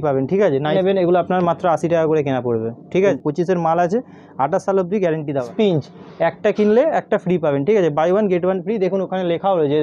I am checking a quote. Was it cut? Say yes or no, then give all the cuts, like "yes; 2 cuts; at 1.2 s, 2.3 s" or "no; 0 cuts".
yes; 3 cuts; at 0.7 s, 3.2 s, 5.5 s